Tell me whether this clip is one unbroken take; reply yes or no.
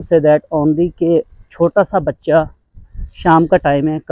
yes